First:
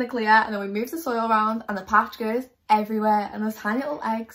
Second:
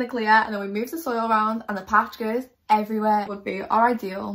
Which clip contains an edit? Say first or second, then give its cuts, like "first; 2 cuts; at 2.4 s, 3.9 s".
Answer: second; 1 cut; at 3.3 s